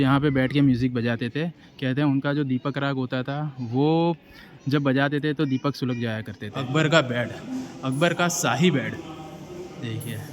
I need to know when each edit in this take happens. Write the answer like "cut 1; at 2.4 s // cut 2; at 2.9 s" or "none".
cut 1; at 6.5 s

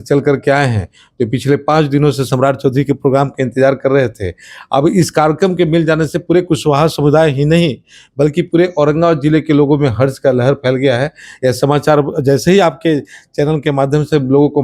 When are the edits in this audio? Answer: none

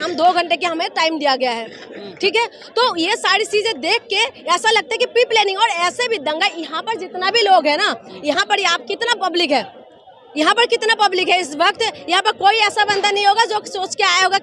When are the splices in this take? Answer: none

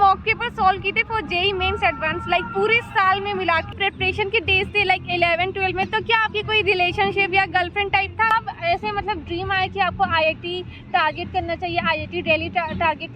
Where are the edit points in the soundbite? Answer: cut 1; at 3.8 s // cut 2; at 8.3 s

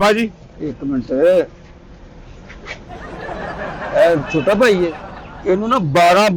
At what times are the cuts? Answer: cut 1; at 5.0 s

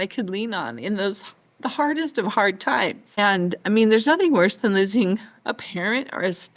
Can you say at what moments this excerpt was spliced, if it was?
cut 1; at 3.0 s

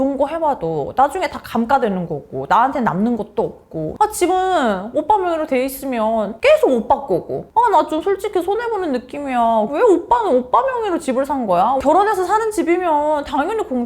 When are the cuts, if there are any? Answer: cut 1; at 3.9 s // cut 2; at 9.7 s

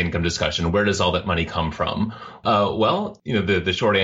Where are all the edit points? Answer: cut 1; at 2.4 s // cut 2; at 3.2 s

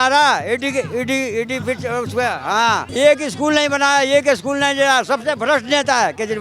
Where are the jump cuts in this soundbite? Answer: cut 1; at 2.9 s

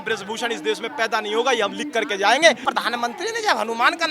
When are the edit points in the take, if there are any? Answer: cut 1; at 2.6 s

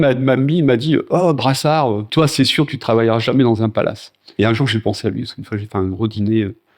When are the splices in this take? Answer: cut 1; at 2.1 s // cut 2; at 4.3 s

